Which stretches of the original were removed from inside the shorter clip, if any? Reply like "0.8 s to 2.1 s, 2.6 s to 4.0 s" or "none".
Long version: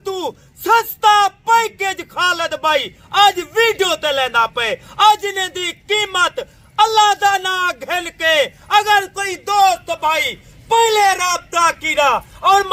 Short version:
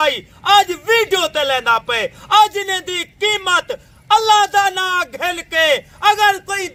none